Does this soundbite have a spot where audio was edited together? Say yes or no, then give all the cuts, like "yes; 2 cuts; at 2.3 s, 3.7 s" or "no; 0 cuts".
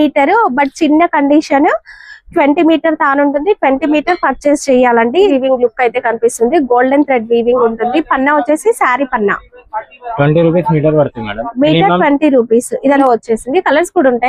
yes; 2 cuts; at 5.3 s, 13.0 s